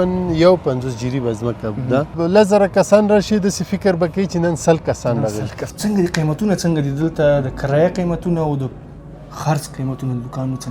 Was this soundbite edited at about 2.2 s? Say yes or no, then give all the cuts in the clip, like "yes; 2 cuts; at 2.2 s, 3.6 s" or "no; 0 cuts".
yes; 2 cuts; at 2.2 s, 5.6 s